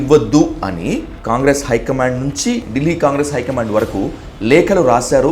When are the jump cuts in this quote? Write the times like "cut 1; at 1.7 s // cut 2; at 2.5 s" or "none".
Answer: cut 1; at 1.1 s // cut 2; at 2.7 s

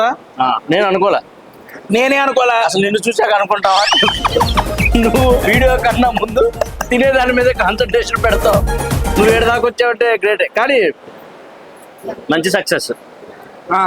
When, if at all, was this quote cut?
none

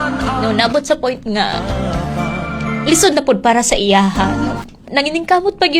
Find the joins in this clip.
cut 1; at 4.8 s

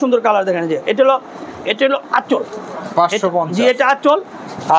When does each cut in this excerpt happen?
none

